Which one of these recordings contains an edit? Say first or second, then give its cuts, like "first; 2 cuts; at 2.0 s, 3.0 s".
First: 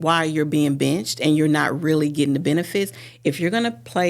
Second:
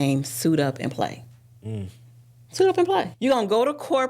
second; 1 cut; at 3.1 s